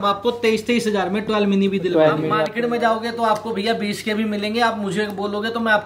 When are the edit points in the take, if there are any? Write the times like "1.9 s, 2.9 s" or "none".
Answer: 2.4 s